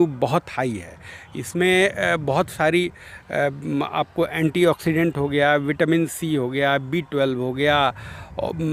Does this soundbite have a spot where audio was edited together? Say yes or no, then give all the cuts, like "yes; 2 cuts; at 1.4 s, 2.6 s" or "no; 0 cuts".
no; 0 cuts